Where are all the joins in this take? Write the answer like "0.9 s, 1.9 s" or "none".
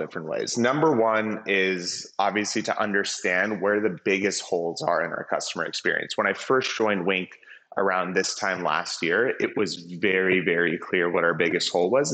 none